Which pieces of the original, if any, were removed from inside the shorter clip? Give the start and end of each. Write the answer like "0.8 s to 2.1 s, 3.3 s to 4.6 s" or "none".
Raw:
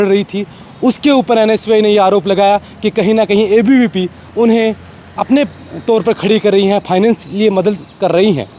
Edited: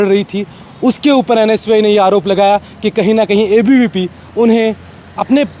none

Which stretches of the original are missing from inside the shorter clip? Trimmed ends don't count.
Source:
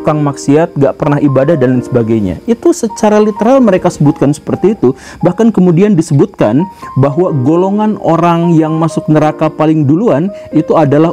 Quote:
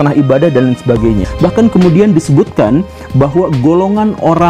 2.3 s to 5.1 s

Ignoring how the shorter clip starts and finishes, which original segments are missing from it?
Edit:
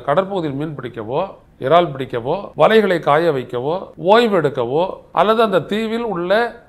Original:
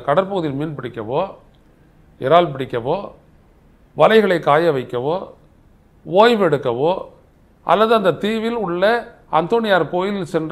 1.4 s to 2.0 s, 3.1 s to 3.9 s, 5.3 s to 6.0 s, 7.1 s to 7.5 s

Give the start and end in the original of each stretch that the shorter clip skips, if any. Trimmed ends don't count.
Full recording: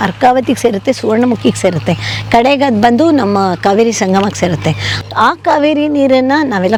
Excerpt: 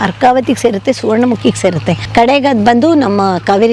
2.0 s to 2.2 s

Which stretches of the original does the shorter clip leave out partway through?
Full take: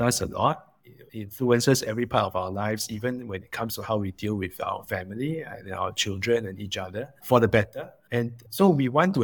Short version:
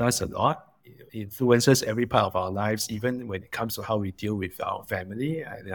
none

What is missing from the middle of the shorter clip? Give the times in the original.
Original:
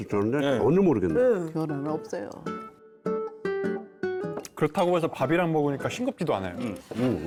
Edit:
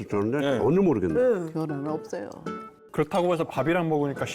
2.8 s to 4.4 s

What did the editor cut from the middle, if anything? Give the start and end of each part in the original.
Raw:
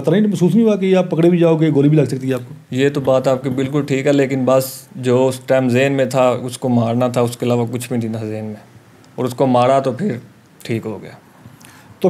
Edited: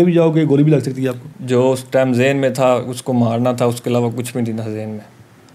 2.5 s to 4.8 s

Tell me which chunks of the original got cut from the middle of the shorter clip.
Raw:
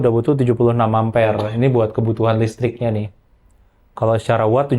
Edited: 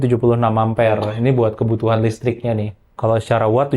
3.2 s to 3.8 s

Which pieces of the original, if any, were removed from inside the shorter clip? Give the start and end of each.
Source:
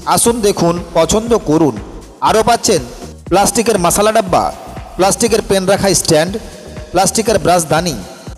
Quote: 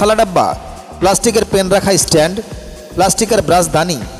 none

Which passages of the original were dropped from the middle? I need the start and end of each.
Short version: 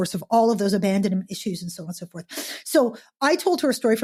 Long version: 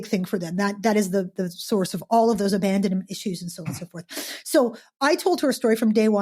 none

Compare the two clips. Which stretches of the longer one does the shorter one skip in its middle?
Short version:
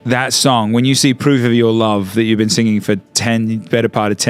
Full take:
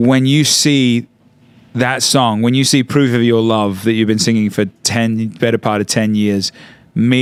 none

